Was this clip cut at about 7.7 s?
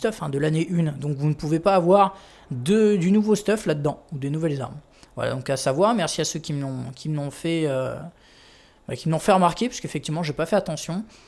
yes; 1 cut; at 7.7 s

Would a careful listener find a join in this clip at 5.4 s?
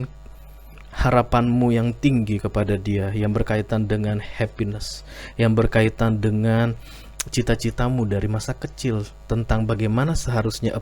no; 0 cuts

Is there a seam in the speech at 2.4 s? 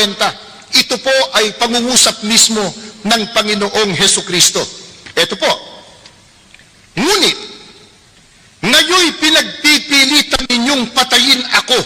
yes; 1 cut; at 2.4 s

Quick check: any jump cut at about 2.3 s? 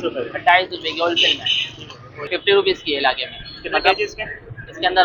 yes; 1 cut; at 2.3 s

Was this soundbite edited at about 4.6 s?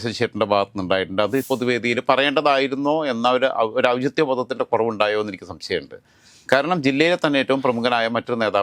no; 1 cut; at 1.5 s

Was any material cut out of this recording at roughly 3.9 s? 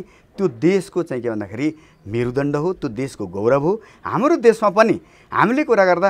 no; 0 cuts

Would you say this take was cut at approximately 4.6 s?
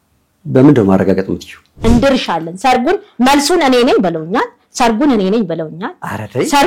no; 1 cut; at 1.7 s

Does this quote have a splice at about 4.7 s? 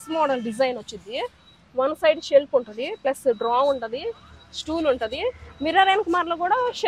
no; 0 cuts

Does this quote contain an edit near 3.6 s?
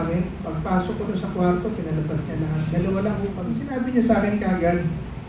yes; 1 cut; at 3.6 s

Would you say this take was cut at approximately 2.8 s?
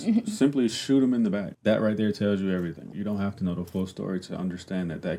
yes; 2 cuts; at 1.5 s, 2.8 s

